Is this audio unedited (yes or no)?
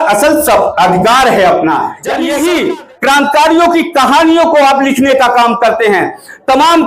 no